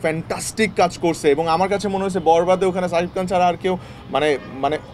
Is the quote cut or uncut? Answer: uncut